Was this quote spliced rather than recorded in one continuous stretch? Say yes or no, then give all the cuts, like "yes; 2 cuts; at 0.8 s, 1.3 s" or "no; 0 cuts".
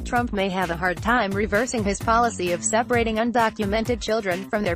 no; 0 cuts